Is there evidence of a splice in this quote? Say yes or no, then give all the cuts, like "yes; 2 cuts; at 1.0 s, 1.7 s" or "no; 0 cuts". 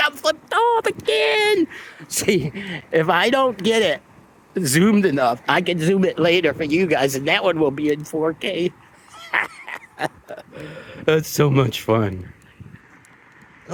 no; 0 cuts